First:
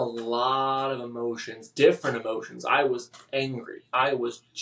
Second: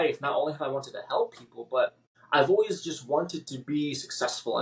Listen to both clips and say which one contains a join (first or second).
second